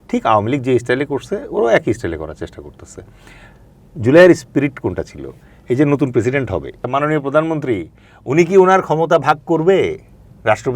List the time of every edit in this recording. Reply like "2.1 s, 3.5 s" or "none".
6.9 s